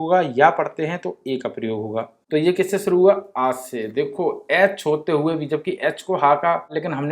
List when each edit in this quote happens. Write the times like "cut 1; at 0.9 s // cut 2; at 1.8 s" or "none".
cut 1; at 2.2 s